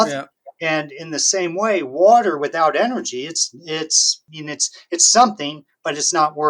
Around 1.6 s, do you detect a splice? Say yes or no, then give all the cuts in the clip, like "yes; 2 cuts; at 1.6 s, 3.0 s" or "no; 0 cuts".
no; 1 cut; at 4.2 s